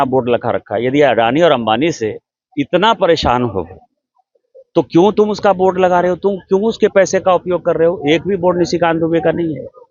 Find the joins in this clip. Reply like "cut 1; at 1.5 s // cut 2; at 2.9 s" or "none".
none